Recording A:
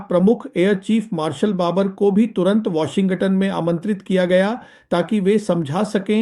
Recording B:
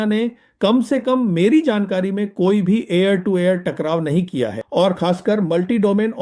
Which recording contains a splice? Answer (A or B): B